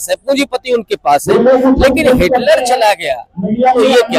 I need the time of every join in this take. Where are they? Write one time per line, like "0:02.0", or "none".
none